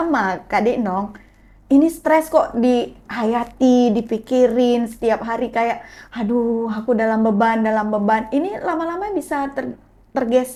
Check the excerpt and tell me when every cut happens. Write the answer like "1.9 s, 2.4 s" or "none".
none